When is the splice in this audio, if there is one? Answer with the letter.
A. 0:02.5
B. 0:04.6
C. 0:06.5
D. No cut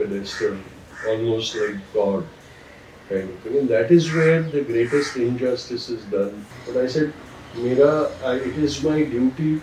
C